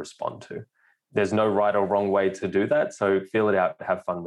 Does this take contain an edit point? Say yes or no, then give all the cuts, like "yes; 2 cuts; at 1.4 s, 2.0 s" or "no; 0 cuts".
yes; 2 cuts; at 1.4 s, 2.4 s